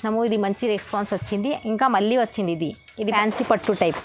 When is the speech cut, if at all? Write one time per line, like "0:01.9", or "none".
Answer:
0:03.1